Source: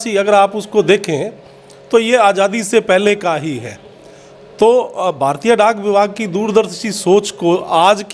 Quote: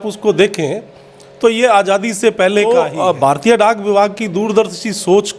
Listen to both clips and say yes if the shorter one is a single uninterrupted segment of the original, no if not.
no